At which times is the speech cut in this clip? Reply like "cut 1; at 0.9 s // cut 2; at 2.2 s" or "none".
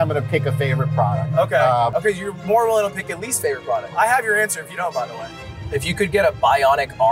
cut 1; at 3.8 s // cut 2; at 5.2 s